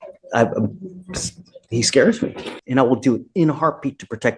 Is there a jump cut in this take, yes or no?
yes